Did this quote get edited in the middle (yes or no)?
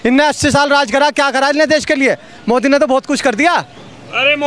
no